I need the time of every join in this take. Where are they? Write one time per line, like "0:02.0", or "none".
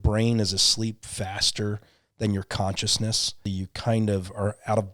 0:03.4